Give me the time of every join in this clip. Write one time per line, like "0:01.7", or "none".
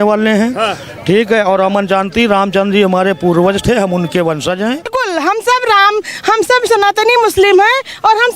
0:04.9